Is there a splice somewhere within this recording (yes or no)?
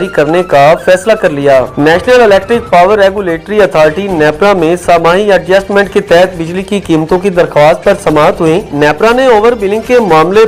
no